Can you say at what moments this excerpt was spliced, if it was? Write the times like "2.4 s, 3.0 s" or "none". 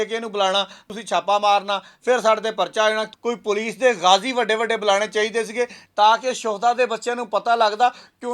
0.8 s, 3.1 s, 5.8 s